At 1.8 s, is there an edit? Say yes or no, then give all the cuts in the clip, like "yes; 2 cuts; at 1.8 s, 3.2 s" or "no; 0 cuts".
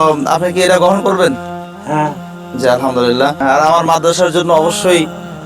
no; 1 cut; at 3.4 s